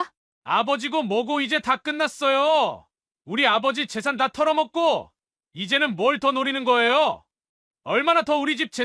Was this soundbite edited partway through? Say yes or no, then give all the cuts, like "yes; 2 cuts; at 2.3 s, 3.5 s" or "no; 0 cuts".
no; 0 cuts